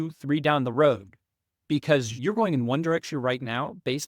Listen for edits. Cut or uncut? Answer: cut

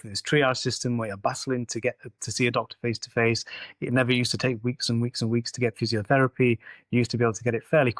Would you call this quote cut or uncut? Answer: uncut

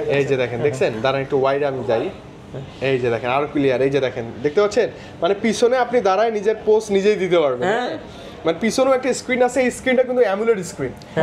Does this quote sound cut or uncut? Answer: uncut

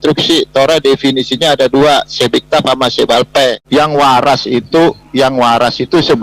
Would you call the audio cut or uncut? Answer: cut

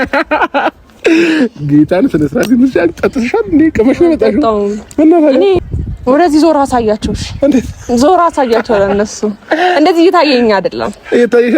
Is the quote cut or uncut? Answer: cut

